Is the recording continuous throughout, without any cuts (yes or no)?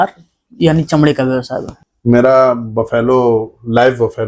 no